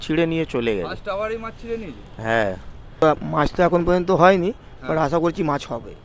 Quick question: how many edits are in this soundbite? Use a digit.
1